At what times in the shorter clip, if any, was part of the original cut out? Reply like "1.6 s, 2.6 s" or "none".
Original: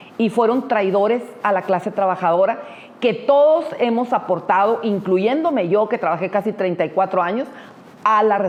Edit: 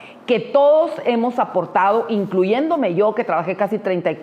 none